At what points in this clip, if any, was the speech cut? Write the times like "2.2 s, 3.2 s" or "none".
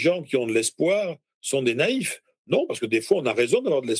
none